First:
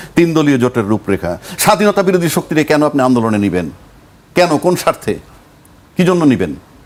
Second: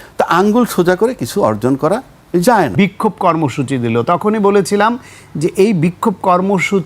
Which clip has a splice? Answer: second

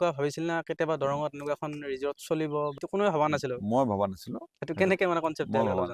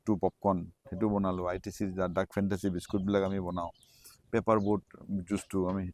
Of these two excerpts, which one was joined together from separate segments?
first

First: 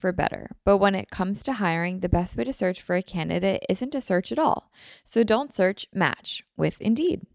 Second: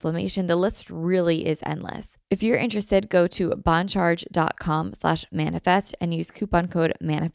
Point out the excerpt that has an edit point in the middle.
second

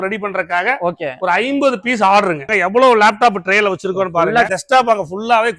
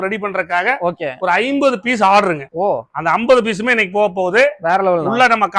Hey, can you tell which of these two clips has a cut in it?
first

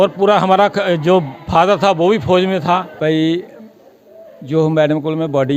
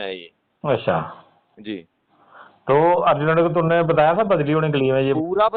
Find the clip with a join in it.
first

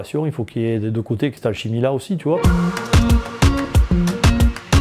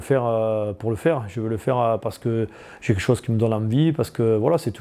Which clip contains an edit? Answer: first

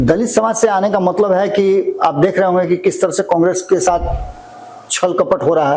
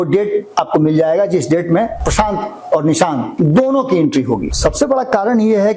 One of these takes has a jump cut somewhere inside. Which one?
second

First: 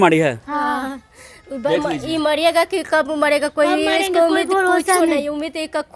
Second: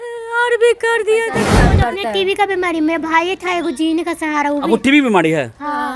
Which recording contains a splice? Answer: second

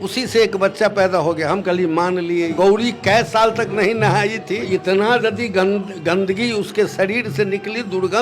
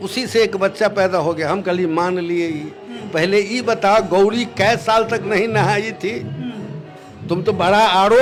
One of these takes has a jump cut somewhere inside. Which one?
first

